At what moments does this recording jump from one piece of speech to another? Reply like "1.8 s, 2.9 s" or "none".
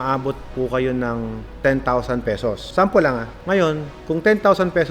1.5 s, 2.6 s, 3.3 s